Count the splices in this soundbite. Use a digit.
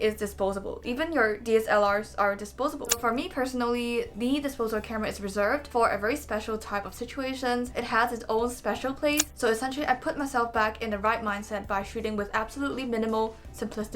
4